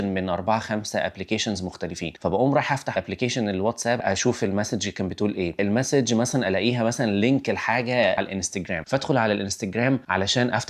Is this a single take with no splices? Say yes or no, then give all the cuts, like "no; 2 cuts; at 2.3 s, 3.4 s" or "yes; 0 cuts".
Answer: no; 4 cuts; at 2.9 s, 4.0 s, 5.6 s, 8.2 s